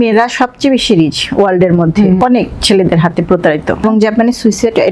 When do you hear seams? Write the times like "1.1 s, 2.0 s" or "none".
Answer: 2.2 s, 3.8 s